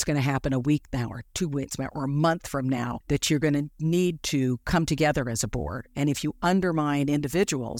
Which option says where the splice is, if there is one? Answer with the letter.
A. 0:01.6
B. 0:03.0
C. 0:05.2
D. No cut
B